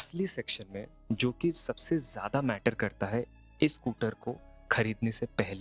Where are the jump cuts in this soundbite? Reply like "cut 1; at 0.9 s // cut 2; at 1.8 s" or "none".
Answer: none